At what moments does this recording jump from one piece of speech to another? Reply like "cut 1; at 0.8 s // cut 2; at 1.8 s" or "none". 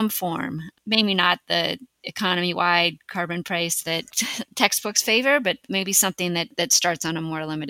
cut 1; at 6.5 s